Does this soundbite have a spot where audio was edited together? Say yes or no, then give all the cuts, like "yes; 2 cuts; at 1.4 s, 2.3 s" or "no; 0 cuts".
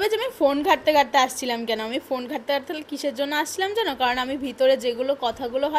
no; 0 cuts